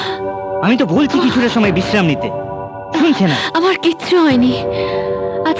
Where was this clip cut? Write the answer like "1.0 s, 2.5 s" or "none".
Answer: none